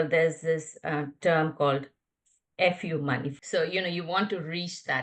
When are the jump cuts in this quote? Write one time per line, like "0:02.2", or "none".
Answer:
none